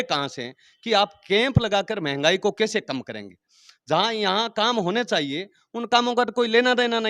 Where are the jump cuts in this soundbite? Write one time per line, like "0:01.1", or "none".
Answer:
none